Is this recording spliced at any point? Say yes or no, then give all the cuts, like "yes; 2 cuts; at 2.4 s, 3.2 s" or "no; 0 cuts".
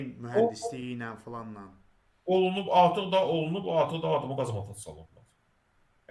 no; 0 cuts